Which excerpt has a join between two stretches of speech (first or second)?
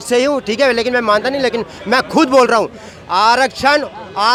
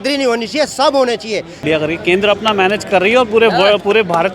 second